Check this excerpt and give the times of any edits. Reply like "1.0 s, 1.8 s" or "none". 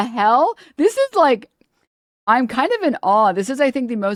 none

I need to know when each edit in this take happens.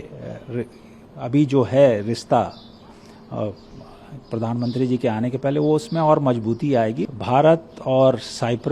7.0 s

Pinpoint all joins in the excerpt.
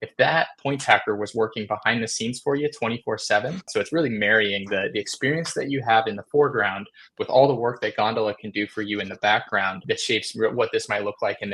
3.7 s, 9.8 s

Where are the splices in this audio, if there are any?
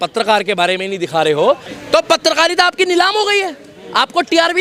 1.7 s

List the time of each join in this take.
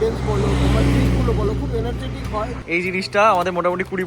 2.6 s

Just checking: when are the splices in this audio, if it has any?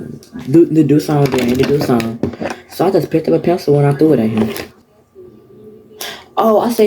4.7 s

